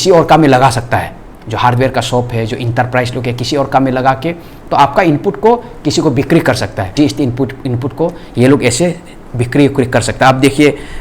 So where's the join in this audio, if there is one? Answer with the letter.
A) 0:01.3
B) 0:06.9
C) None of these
B